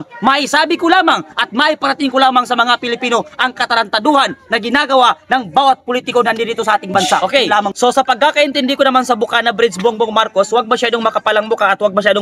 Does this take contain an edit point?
yes; 1 cut; at 7.7 s

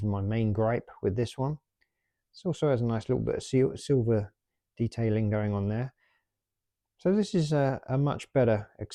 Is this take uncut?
yes; 0 cuts

